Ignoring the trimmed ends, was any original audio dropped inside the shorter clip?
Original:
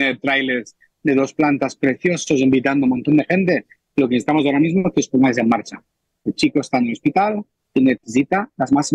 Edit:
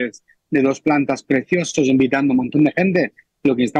no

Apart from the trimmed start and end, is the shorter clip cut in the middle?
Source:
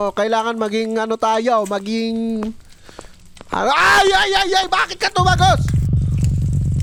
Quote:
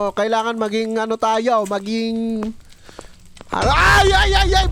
no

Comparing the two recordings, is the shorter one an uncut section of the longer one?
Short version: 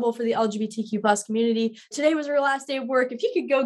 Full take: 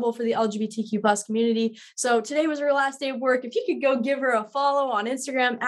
no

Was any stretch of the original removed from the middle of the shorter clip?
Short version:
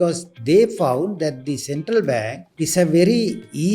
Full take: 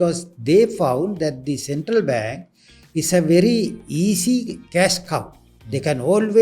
yes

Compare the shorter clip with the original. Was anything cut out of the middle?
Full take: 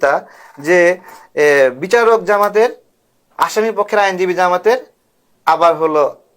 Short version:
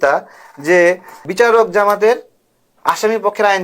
yes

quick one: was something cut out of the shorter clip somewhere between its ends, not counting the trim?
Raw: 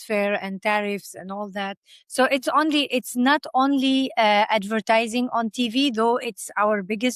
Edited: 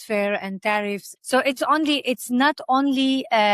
yes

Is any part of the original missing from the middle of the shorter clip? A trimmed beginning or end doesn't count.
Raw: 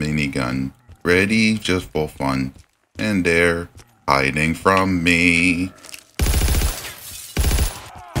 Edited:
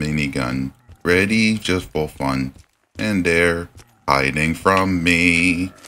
no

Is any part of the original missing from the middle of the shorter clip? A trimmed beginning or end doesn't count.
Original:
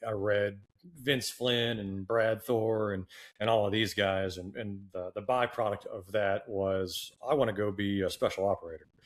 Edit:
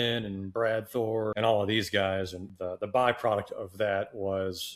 yes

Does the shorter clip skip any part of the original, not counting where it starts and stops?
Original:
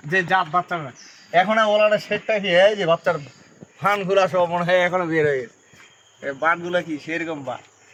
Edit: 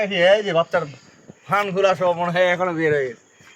no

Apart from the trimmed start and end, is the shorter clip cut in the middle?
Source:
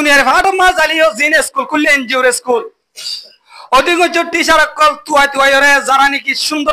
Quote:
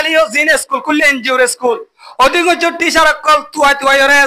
yes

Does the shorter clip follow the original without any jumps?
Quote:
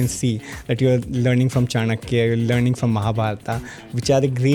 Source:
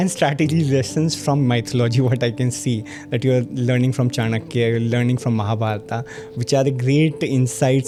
yes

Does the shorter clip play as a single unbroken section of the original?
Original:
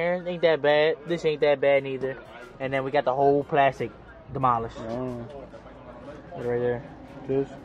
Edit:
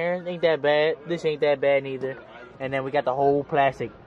yes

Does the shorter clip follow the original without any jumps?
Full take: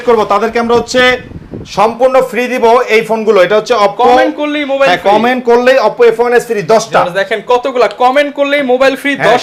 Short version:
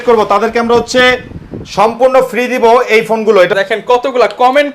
no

